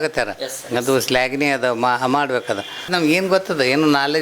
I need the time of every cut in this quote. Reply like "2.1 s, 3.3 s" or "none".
2.9 s